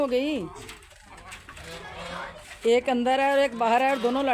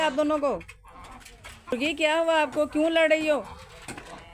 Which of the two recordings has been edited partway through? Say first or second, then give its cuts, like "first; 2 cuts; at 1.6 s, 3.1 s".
second; 1 cut; at 1.7 s